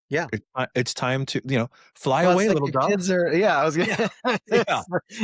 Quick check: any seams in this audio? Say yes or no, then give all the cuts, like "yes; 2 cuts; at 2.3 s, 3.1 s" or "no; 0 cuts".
no; 0 cuts